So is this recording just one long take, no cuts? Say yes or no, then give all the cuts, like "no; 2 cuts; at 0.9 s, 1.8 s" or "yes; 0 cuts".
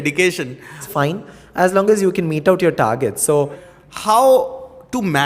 no; 2 cuts; at 0.9 s, 3.7 s